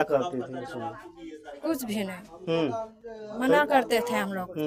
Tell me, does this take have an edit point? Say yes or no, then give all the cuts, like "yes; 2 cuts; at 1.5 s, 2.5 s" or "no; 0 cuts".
no; 0 cuts